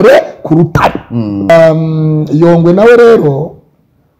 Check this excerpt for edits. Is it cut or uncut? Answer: cut